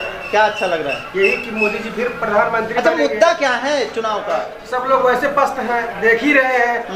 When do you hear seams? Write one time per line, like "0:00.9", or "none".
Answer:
0:04.6